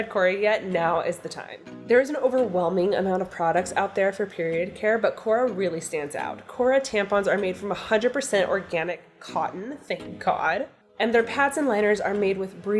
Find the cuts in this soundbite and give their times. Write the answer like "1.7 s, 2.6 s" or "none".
10.8 s